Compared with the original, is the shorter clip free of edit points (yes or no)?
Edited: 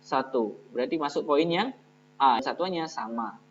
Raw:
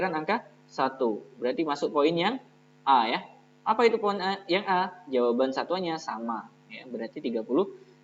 no